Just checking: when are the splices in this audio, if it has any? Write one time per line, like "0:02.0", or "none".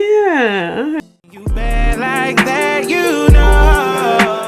0:01.0